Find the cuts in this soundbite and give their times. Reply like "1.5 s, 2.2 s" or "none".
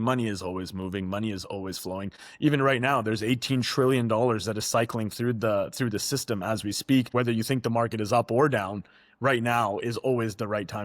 2.2 s, 7.1 s